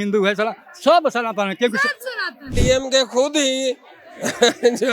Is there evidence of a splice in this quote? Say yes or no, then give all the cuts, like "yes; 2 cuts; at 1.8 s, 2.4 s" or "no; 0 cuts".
yes; 1 cut; at 2.6 s